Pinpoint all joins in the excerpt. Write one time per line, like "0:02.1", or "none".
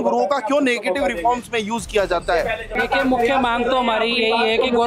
0:02.8